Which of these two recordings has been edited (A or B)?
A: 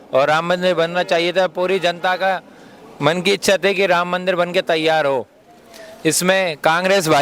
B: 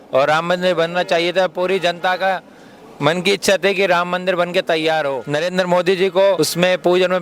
B